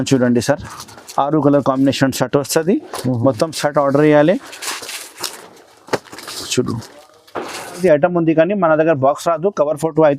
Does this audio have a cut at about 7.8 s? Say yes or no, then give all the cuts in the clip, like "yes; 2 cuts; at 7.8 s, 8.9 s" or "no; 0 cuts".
yes; 1 cut; at 7.8 s